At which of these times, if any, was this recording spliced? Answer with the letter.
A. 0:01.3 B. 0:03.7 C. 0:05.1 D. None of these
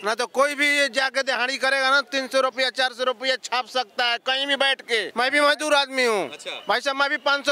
C